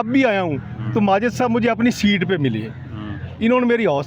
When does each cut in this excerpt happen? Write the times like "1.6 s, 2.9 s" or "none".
none

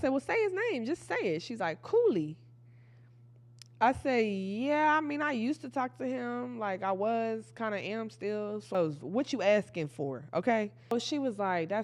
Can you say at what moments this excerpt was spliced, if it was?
8.7 s, 10.9 s

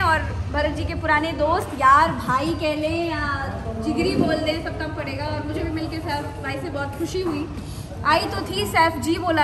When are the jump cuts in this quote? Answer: none

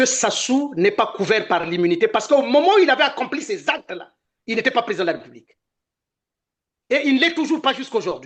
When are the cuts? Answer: none

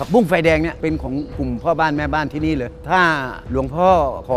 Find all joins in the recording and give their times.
none

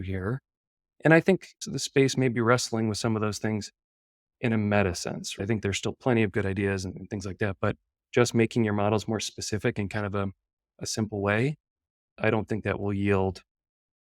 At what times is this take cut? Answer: 5.4 s

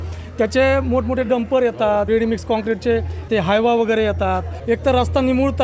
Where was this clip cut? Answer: 2.1 s, 3.3 s, 4.5 s

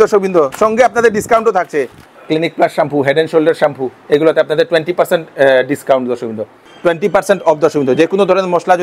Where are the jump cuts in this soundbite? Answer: 2.0 s, 6.7 s

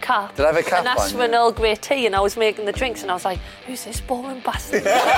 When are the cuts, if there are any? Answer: none

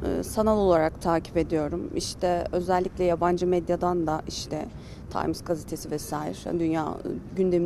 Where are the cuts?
none

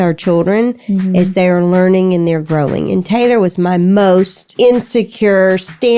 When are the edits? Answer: 4.4 s

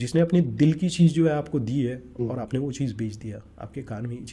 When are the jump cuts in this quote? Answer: none

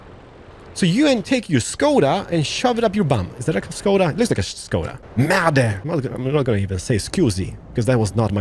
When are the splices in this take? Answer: 5.0 s, 5.8 s

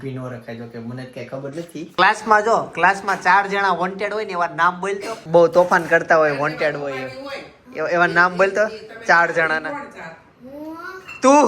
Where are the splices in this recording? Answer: 1.9 s

